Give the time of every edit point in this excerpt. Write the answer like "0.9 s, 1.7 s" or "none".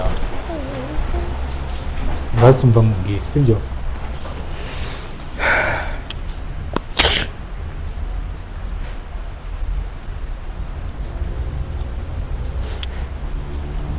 none